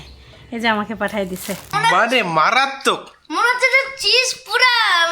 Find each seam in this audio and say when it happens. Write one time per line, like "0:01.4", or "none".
0:01.7